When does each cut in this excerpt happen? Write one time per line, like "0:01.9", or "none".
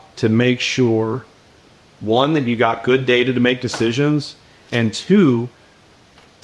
none

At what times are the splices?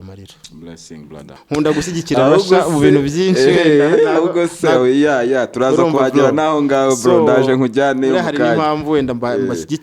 0:01.4

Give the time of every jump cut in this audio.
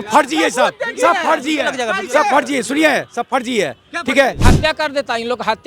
0:04.4

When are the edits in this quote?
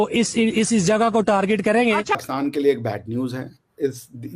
0:02.2

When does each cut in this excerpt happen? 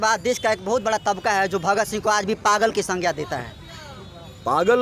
none

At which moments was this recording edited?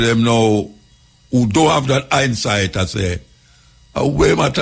none

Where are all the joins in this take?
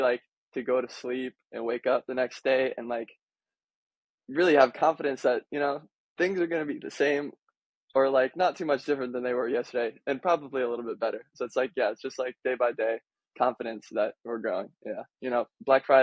0:15.1

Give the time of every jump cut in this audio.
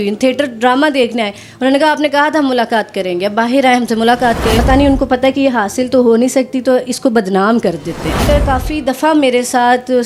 0:04.6
0:08.3

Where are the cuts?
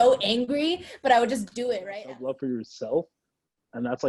0:01.9

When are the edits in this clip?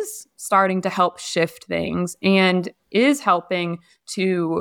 none

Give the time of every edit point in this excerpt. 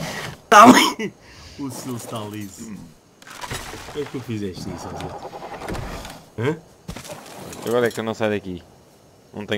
none

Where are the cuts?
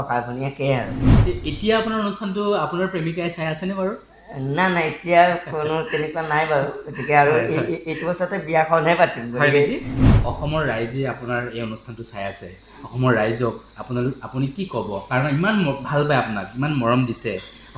0:01.1
0:10.0

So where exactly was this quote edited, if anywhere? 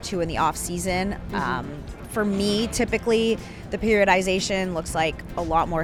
none

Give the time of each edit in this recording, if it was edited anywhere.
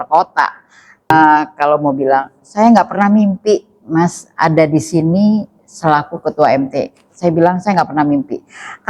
0:01.1

